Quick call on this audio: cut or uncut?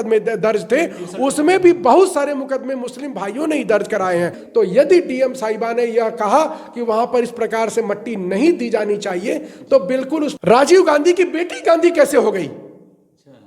cut